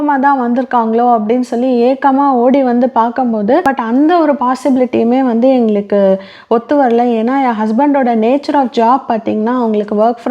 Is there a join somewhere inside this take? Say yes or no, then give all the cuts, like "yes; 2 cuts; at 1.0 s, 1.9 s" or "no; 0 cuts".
yes; 1 cut; at 3.7 s